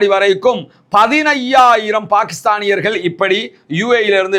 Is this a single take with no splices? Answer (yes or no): yes